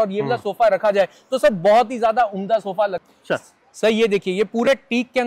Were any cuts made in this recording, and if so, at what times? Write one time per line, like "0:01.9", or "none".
0:03.0